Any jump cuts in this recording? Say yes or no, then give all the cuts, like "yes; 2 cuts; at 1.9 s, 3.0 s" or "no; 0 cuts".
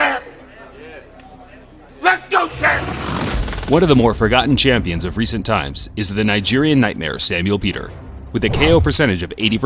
yes; 1 cut; at 1.0 s